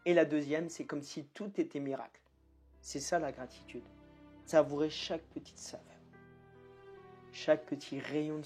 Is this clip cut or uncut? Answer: cut